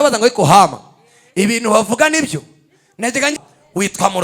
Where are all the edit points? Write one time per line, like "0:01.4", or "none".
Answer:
0:03.3